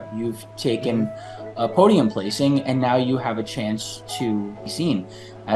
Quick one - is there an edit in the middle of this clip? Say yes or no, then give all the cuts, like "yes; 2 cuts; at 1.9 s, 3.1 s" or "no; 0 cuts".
yes; 1 cut; at 4.6 s